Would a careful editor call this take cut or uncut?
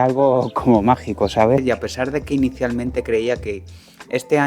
cut